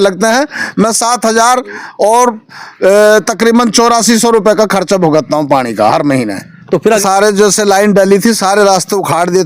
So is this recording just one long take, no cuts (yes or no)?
no